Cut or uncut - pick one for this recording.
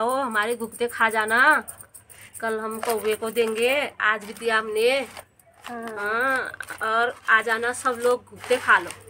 uncut